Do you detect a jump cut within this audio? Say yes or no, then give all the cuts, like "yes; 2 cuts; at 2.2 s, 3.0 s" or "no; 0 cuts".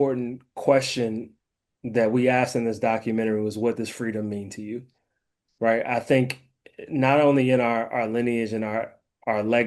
no; 0 cuts